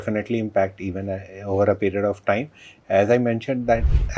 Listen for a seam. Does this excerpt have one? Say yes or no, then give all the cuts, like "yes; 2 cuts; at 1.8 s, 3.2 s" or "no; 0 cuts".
no; 0 cuts